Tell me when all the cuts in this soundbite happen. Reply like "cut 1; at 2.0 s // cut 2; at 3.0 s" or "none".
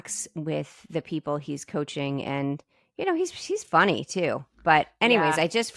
none